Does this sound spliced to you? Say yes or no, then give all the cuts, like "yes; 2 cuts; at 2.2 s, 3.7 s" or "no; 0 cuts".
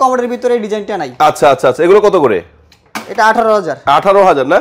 no; 0 cuts